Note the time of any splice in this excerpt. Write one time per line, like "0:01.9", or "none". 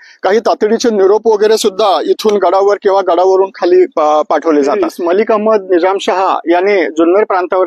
0:04.9

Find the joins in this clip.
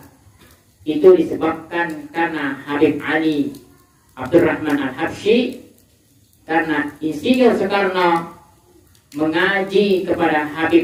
none

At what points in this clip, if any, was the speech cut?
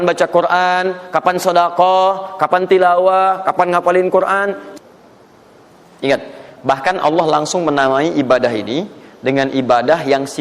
0:04.6

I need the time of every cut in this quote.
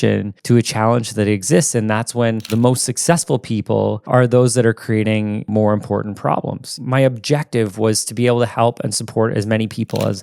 0:02.5
0:05.5
0:06.8

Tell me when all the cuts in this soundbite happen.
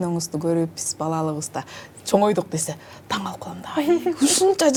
none

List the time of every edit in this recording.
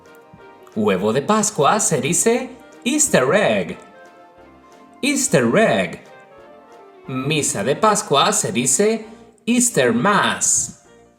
none

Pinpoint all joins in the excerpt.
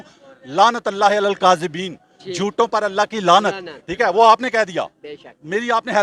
none

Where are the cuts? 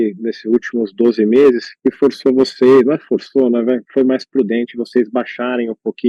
0:01.7

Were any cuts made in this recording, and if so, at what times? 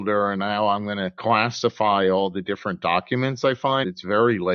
0:01.1
0:03.8

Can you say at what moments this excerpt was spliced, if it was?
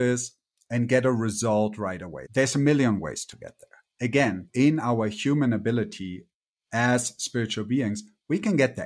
0:02.2
0:04.4

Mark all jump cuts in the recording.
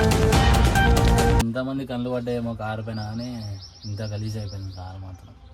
0:01.4

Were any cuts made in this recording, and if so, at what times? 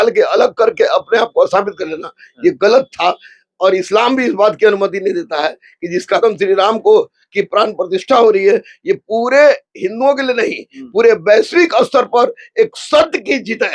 0:06.2

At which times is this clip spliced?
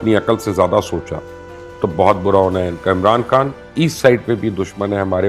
0:03.6

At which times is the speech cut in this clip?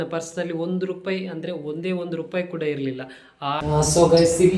0:03.6

